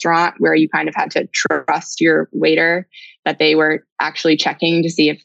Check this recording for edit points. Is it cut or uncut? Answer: uncut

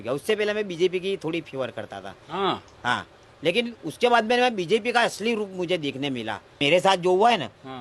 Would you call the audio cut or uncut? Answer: cut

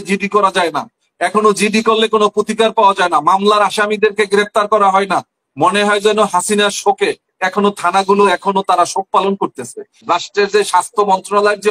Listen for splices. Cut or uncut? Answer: cut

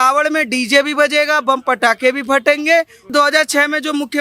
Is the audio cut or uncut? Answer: cut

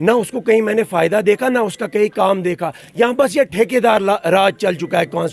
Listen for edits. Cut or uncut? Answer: uncut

